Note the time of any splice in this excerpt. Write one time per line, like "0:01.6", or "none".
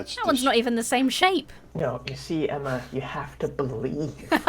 0:01.6